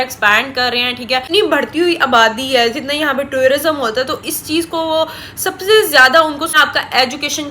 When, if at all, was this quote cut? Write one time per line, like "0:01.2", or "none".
0:01.3
0:06.5

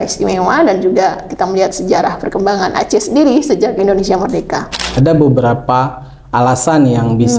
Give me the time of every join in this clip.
0:04.9

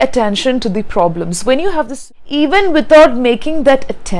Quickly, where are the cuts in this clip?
0:02.0

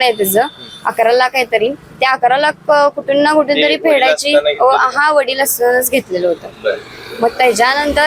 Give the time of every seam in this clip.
none

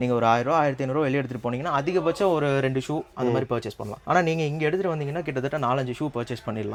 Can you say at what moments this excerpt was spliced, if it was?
none

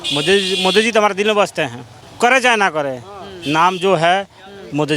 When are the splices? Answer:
0:02.0

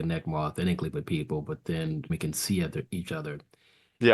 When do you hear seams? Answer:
0:02.1

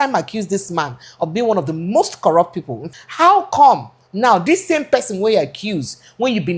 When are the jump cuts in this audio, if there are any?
0:02.7

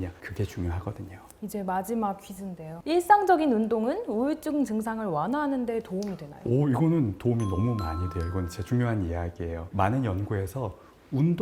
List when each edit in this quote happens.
none

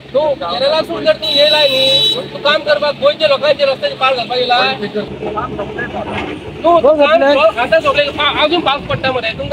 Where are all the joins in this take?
0:05.1

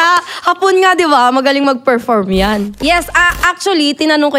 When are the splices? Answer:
0:02.7

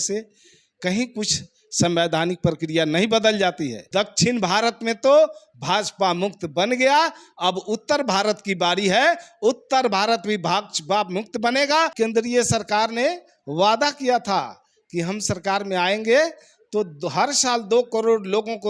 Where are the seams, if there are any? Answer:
0:03.8
0:11.9

